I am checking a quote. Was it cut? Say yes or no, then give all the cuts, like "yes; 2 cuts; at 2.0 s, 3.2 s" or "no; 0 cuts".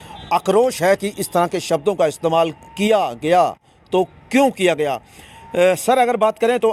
no; 0 cuts